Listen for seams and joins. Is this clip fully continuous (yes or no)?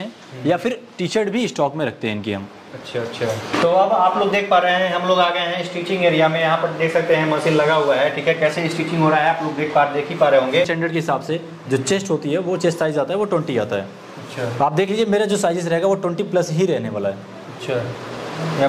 no